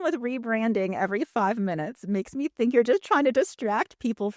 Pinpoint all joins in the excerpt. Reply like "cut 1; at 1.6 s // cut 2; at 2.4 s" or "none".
none